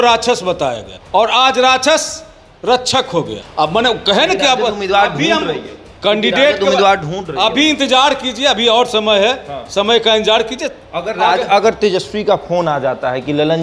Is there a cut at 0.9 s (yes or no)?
yes